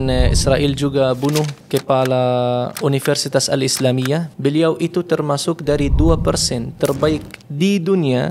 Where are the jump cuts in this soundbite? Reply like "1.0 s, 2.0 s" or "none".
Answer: 1.6 s, 2.7 s, 4.3 s